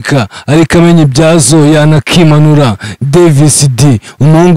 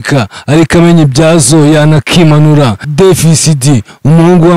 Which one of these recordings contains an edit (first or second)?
second